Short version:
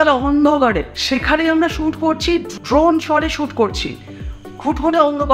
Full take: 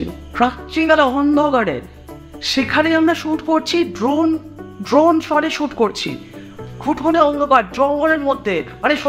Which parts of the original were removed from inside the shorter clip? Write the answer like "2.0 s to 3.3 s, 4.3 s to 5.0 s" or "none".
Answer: 1.8 s to 2.4 s, 3.9 s to 4.7 s